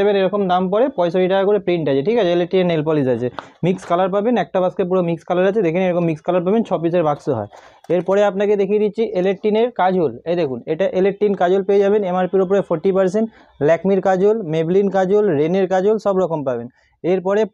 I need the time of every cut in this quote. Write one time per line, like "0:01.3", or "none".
none